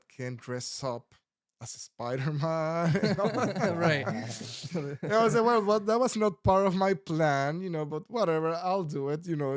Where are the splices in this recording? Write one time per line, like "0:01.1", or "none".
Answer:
none